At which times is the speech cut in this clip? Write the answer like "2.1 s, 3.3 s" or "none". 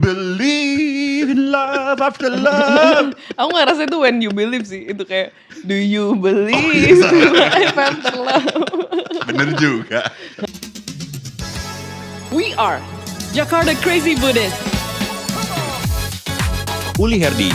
10.4 s

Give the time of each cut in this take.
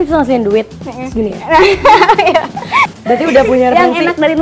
2.8 s

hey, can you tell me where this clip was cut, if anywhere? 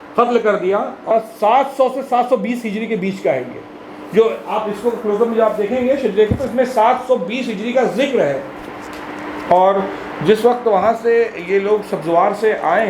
1.1 s

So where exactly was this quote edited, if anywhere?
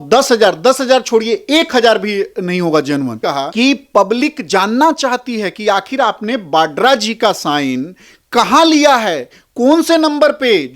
3.2 s

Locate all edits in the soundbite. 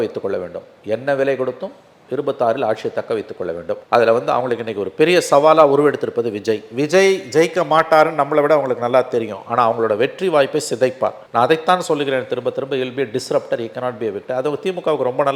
none

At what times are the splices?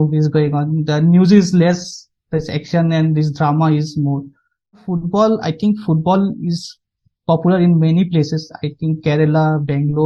4.9 s

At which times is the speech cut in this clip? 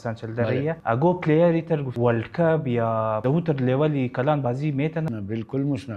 0.8 s, 1.9 s, 3.2 s, 5.1 s

